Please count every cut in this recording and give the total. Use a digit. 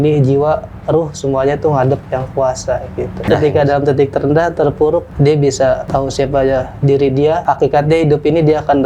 4